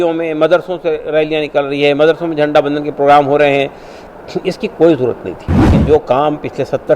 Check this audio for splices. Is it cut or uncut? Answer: cut